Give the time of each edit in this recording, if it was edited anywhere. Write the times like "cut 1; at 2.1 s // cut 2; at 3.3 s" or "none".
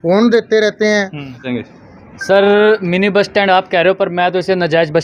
cut 1; at 1.5 s